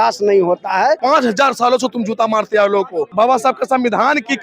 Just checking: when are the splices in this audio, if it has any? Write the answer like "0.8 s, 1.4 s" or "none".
1.0 s, 3.1 s